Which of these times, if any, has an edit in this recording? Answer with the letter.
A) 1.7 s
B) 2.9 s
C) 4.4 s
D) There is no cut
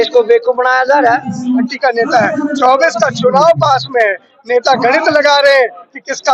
A